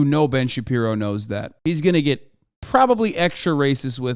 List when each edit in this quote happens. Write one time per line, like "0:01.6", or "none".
0:01.5